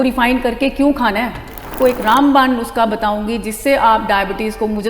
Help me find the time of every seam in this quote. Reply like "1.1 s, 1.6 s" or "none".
1.7 s